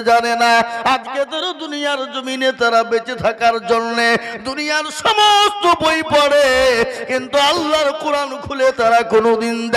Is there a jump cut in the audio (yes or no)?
no